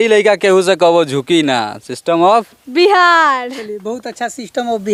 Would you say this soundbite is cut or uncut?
uncut